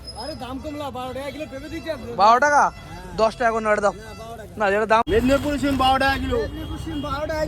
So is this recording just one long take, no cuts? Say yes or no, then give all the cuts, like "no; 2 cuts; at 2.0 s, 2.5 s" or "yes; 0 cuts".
no; 1 cut; at 5.1 s